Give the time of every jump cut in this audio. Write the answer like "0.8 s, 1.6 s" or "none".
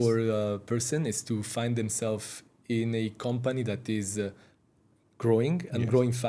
none